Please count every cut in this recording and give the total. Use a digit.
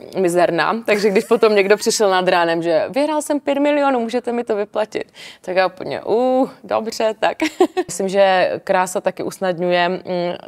1